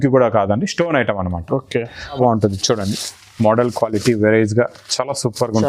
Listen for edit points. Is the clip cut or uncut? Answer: cut